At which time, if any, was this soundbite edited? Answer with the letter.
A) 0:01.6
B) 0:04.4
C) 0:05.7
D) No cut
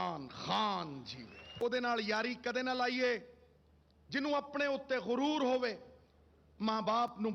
A